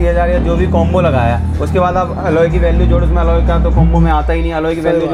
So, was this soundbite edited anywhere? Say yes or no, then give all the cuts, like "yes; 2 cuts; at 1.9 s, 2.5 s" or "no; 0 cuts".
no; 0 cuts